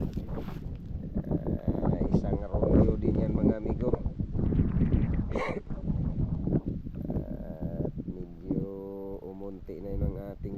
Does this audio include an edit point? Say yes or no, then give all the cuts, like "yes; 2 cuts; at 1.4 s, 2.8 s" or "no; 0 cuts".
no; 0 cuts